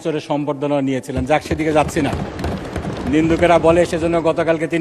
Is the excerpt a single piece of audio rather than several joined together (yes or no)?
yes